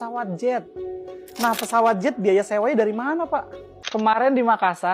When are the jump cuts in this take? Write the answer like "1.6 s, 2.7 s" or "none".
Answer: 3.3 s